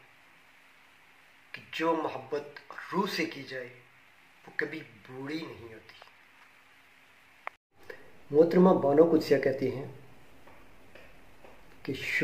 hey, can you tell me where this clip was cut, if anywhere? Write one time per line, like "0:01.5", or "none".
0:07.7